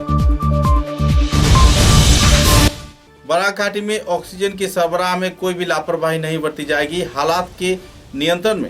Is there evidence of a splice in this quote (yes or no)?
yes